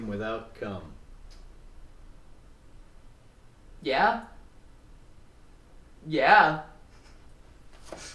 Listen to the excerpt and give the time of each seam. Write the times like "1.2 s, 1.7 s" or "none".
none